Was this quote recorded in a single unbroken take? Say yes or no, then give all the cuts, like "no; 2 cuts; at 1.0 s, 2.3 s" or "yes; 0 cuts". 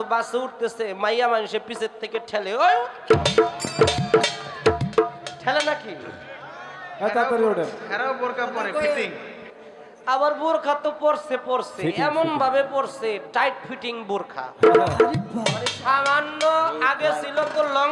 yes; 0 cuts